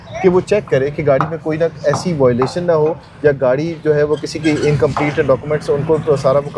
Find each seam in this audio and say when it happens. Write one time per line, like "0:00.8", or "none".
none